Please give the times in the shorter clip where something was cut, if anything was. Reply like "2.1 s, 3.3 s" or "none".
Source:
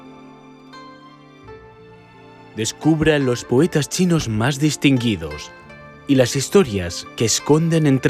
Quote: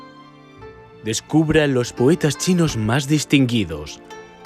1.0 s